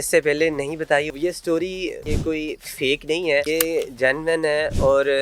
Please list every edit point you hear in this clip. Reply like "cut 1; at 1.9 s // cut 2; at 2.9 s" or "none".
cut 1; at 1.1 s // cut 2; at 2.1 s // cut 3; at 3.5 s